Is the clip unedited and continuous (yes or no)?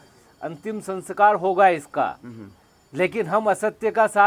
yes